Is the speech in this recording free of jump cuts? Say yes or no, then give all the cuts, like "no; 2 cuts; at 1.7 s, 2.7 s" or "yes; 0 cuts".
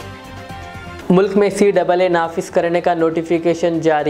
yes; 0 cuts